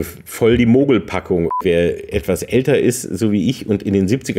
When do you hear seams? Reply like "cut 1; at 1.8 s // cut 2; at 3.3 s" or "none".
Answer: cut 1; at 1.6 s